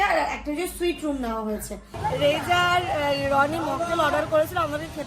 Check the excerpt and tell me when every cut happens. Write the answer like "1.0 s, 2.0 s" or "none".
1.8 s